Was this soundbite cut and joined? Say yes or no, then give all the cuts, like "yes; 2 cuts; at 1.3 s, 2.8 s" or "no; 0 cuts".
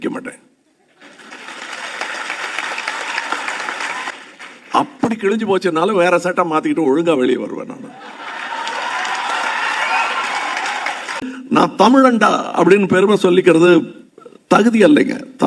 yes; 2 cuts; at 4.1 s, 11.3 s